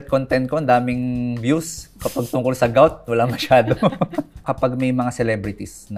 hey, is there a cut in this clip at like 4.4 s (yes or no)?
yes